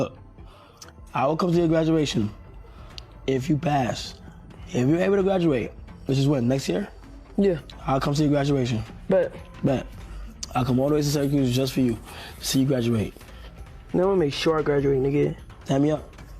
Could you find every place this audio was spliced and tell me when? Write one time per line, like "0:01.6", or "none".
none